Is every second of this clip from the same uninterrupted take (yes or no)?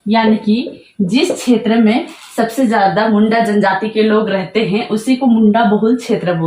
yes